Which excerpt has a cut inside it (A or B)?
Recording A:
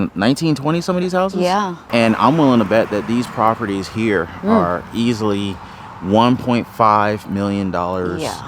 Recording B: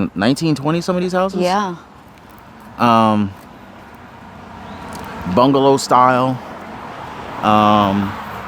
A